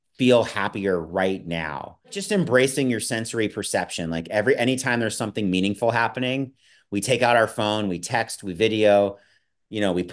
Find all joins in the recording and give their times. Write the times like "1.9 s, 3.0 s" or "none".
2.2 s